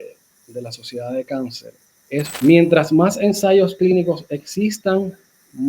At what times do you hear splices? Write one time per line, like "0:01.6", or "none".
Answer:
0:02.3